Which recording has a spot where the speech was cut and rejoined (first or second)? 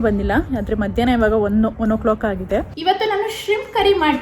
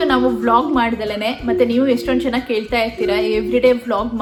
first